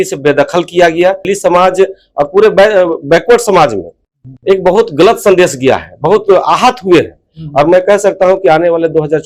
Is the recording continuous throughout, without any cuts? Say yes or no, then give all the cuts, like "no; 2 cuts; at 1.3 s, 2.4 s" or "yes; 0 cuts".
no; 1 cut; at 1.2 s